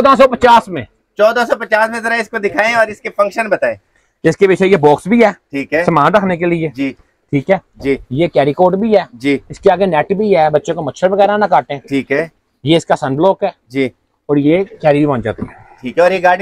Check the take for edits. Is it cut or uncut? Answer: uncut